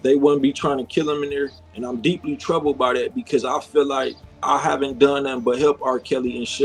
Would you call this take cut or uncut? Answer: uncut